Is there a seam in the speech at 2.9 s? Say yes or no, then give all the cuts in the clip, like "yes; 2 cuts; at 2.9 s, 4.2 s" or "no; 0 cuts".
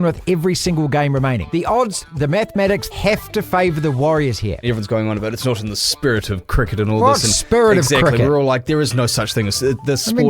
yes; 3 cuts; at 1.4 s, 2.9 s, 4.6 s